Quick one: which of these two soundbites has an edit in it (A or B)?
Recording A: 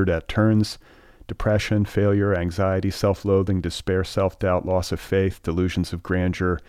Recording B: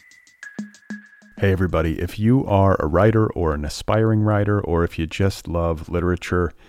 B